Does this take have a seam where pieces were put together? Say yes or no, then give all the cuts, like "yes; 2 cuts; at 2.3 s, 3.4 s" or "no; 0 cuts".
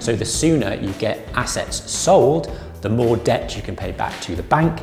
no; 0 cuts